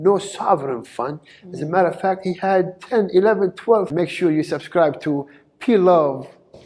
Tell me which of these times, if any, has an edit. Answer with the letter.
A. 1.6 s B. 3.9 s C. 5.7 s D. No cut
B